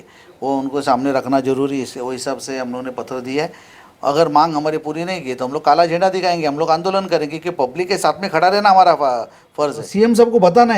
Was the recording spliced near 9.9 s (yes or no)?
yes